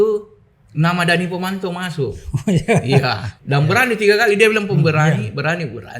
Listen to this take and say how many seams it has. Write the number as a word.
one